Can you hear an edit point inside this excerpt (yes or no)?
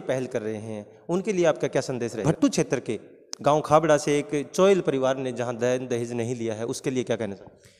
yes